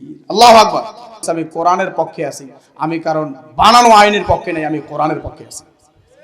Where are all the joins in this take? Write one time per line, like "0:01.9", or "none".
0:01.2